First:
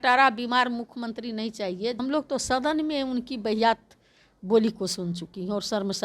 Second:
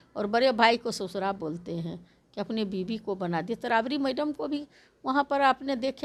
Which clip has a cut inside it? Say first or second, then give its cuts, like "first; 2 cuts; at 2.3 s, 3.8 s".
first; 1 cut; at 2.0 s